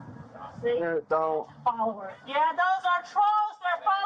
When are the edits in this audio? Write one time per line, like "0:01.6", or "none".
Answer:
0:02.2